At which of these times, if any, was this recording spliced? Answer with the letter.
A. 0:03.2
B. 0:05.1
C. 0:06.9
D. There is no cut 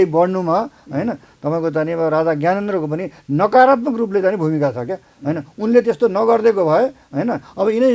D